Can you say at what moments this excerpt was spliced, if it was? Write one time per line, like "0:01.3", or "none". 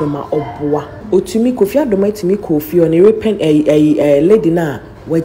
0:00.9

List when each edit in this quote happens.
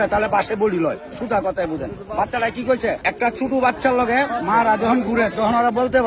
0:03.0

